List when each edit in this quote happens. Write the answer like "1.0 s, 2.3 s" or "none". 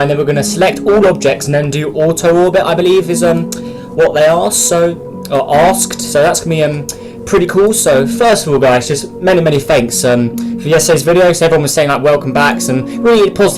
3.4 s